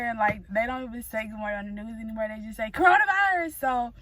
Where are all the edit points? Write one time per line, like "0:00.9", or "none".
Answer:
none